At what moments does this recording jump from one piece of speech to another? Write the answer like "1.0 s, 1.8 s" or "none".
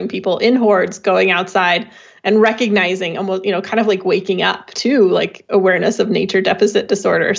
4.7 s